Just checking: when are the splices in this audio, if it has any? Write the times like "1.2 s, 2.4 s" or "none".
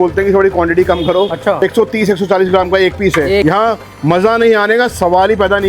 1.6 s, 3.4 s